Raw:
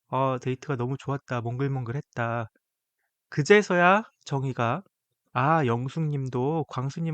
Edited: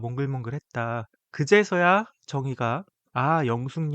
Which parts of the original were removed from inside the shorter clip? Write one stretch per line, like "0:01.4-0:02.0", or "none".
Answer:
0:02.6-0:03.2
0:04.9-0:05.2

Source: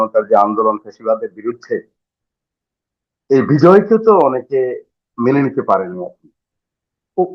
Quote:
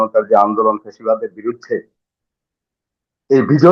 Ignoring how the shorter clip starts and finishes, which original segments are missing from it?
none

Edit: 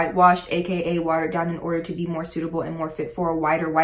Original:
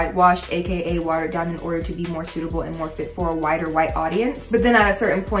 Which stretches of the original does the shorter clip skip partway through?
none

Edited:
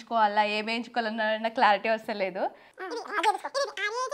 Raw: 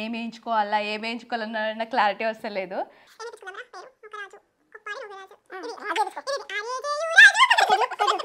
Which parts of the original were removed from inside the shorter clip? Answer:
0:03.0-0:05.4

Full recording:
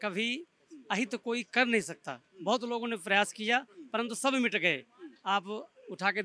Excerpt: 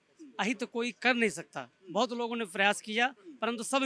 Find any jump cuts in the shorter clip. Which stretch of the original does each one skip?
none

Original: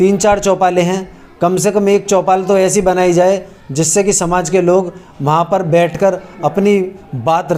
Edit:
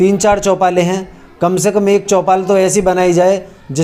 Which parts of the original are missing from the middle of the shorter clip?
none

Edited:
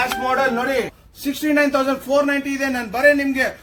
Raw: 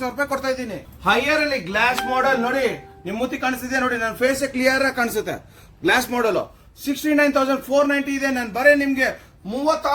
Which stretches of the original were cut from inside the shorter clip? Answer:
0:02.9-0:06.7

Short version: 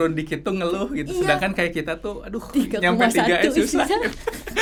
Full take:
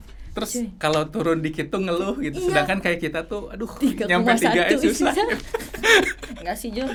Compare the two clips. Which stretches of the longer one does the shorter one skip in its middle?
none

